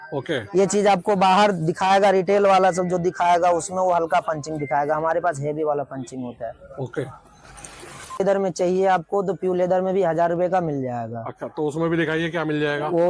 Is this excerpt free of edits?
no; 1 cut; at 8.2 s

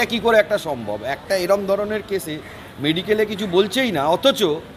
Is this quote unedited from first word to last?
yes; 0 cuts

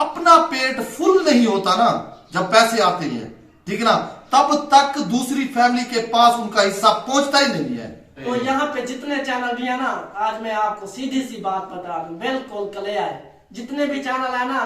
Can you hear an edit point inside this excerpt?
yes; 1 cut; at 8.2 s

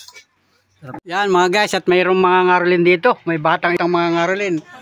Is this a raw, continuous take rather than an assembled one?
no; 2 cuts; at 0.9 s, 3.8 s

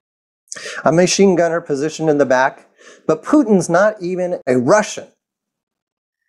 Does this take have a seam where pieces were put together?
yes; 1 cut; at 4.4 s

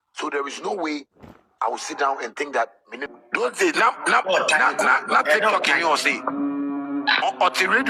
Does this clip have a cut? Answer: yes; 1 cut; at 2.9 s

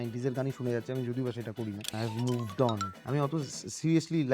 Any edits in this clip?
yes; 2 cuts; at 1.9 s, 2.9 s

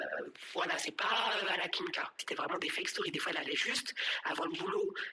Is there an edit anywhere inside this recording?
yes; 1 cut; at 2.2 s

